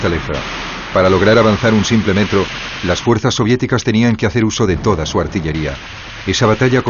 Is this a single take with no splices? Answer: no; 1 cut; at 3.6 s

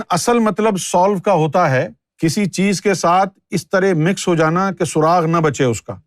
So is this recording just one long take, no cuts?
no; 1 cut; at 2.0 s

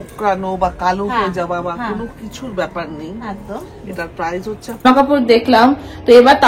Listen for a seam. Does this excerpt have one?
yes; 1 cut; at 4.8 s

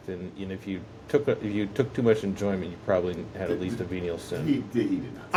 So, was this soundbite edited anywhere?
no; 0 cuts

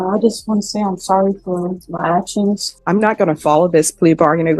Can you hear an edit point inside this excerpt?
yes; 1 cut; at 2.7 s

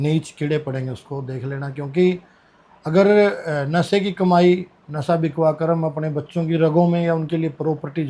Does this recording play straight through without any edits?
yes; 0 cuts

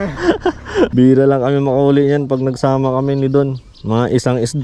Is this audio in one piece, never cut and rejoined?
no; 1 cut; at 0.9 s

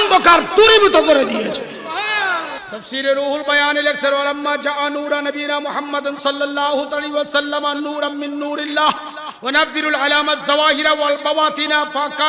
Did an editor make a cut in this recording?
yes; 1 cut; at 2.6 s

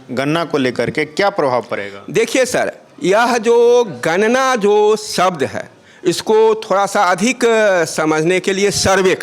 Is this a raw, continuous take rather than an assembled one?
yes; 0 cuts

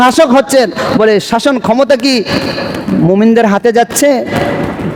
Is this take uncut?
yes; 0 cuts

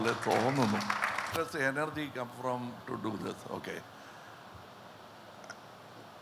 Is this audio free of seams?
no; 1 cut; at 1.3 s

